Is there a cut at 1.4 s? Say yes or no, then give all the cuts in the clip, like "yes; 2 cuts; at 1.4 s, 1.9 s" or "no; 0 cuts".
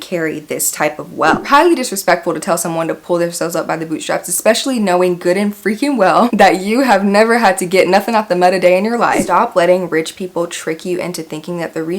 yes; 2 cuts; at 1.4 s, 9.2 s